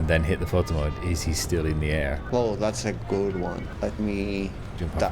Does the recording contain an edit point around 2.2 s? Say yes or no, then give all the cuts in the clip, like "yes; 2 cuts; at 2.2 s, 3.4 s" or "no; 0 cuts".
yes; 2 cuts; at 2.2 s, 3.7 s